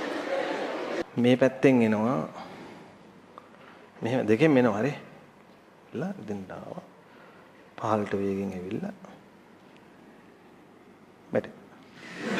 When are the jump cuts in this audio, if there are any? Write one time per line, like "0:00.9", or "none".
0:01.0